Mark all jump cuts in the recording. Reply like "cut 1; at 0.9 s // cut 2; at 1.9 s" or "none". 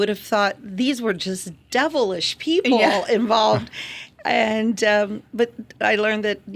none